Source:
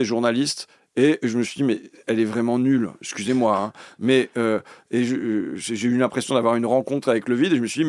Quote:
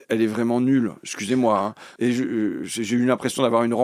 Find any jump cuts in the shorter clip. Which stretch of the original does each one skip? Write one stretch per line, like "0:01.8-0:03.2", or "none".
0:03.8-0:04.8